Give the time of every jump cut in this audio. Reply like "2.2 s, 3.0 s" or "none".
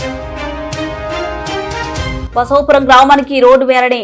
2.1 s